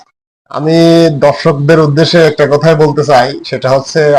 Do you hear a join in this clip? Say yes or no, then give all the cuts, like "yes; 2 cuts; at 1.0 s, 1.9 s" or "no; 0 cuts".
no; 0 cuts